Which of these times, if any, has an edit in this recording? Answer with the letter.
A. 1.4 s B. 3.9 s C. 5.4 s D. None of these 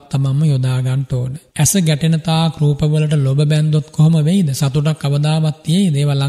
A